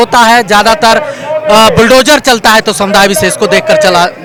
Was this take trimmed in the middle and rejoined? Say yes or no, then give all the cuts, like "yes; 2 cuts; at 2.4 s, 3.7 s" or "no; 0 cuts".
no; 0 cuts